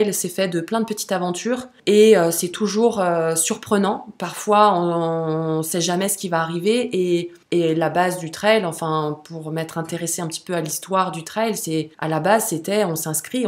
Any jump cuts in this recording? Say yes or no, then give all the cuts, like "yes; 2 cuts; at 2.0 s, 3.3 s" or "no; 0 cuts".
yes; 3 cuts; at 1.7 s, 7.4 s, 11.9 s